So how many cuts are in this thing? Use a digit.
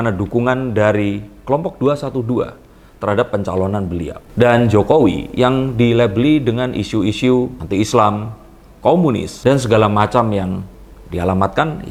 0